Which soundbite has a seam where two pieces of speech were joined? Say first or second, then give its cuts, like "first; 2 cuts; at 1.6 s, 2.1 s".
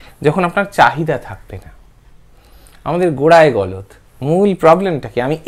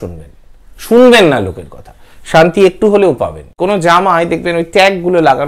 second; 1 cut; at 3.6 s